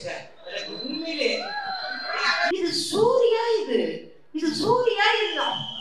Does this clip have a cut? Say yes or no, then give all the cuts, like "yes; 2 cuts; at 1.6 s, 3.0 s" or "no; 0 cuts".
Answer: yes; 1 cut; at 2.5 s